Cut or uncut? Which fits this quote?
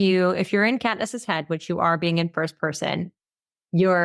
uncut